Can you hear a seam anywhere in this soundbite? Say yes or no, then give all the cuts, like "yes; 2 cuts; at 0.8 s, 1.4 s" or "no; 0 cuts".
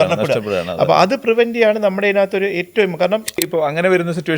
yes; 1 cut; at 3.4 s